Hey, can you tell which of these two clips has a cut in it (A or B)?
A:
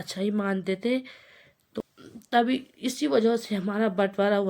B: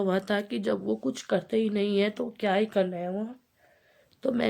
A